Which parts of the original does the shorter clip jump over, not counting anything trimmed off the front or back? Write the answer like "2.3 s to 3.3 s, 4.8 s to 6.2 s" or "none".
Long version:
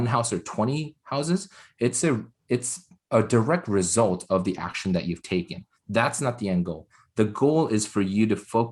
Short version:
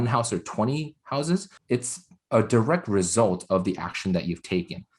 1.5 s to 2.3 s